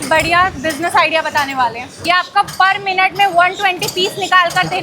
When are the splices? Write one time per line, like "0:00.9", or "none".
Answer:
0:02.0